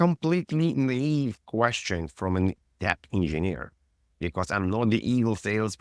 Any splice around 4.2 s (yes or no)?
yes